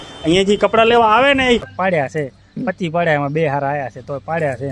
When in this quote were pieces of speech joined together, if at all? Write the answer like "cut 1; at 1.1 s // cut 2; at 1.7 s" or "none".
cut 1; at 1.7 s